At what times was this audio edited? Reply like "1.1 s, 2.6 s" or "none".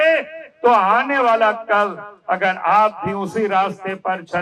none